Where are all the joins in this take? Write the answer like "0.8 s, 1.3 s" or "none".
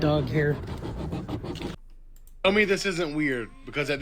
1.8 s